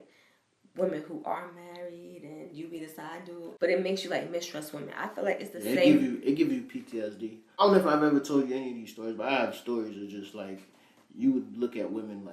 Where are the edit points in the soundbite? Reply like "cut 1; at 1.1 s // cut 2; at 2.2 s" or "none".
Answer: cut 1; at 3.5 s // cut 2; at 7.6 s